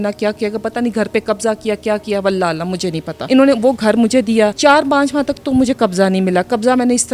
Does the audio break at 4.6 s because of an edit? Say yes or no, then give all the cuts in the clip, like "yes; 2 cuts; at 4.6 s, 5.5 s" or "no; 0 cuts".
yes; 2 cuts; at 3.1 s, 4.6 s